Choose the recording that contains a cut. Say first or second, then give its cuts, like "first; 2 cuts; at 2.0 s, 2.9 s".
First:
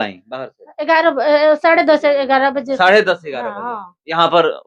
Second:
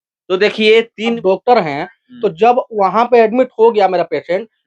second; 1 cut; at 1.2 s